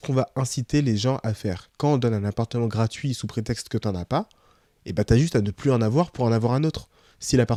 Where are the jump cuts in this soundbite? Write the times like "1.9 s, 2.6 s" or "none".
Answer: none